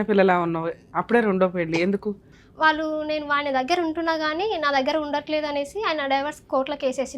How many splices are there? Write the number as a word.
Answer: one